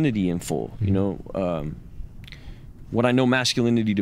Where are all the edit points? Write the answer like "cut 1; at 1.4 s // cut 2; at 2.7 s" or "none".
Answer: none

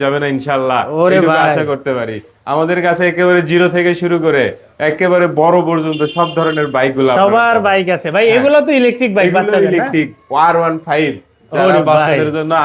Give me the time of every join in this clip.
none

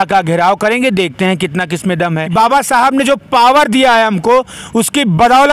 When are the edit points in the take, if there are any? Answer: cut 1; at 2.2 s

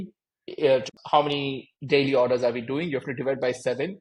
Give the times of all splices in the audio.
cut 1; at 1.3 s

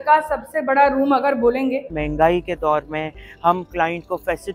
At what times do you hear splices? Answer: cut 1; at 1.9 s

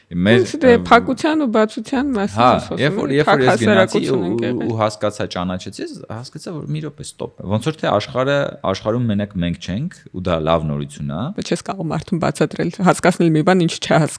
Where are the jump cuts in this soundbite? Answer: cut 1; at 7.4 s // cut 2; at 11.3 s

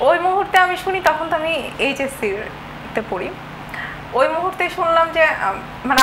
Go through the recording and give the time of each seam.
none

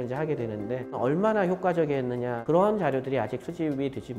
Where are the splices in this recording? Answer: cut 1; at 1.0 s // cut 2; at 2.4 s

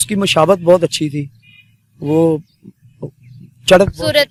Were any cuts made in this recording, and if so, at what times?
none

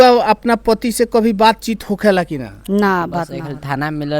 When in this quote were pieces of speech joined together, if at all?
cut 1; at 3.3 s

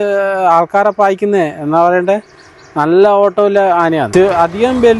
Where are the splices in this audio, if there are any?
cut 1; at 4.1 s

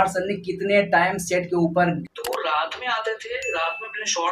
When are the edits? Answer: cut 1; at 2.0 s

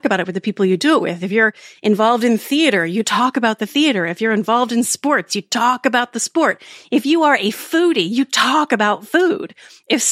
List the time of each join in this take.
none

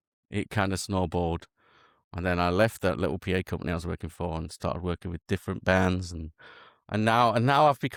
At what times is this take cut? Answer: none

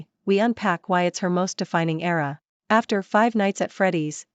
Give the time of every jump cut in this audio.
cut 1; at 2.4 s

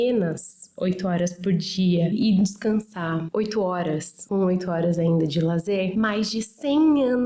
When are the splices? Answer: none

